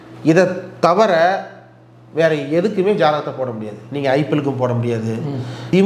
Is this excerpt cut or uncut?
uncut